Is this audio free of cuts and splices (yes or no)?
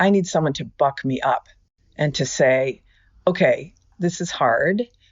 no